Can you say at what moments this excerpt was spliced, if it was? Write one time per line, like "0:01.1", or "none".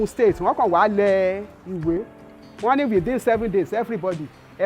0:01.9